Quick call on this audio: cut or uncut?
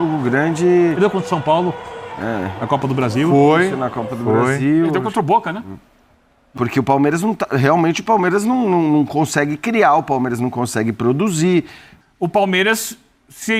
cut